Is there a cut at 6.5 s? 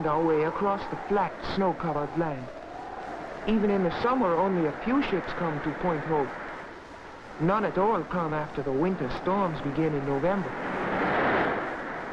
yes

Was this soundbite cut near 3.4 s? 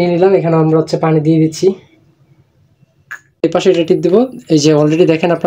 yes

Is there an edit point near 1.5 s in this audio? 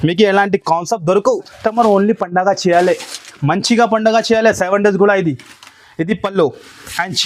yes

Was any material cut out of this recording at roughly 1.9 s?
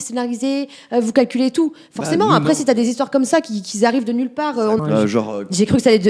no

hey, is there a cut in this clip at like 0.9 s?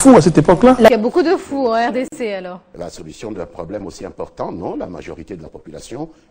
yes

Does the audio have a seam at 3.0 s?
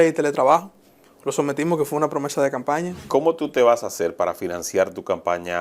yes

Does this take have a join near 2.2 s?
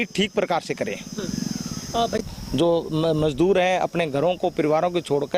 yes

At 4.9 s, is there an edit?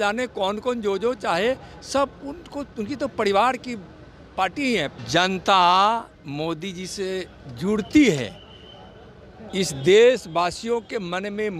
yes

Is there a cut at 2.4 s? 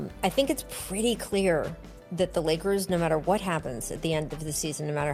no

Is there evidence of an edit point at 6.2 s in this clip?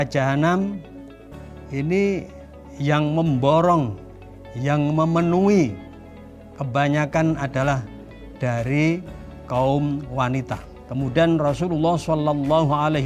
no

